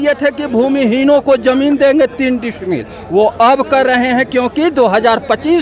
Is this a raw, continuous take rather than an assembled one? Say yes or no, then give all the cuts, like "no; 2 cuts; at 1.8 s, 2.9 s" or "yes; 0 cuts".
yes; 0 cuts